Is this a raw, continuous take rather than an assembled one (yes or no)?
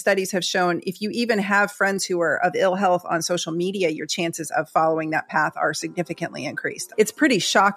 no